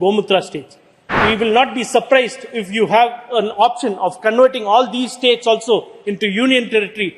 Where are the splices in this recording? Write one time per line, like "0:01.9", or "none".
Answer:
0:01.1